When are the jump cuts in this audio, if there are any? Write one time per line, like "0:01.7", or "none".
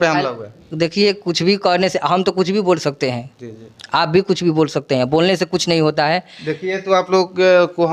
none